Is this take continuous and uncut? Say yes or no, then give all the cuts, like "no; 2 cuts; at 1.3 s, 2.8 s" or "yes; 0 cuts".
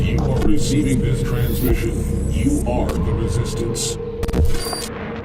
yes; 0 cuts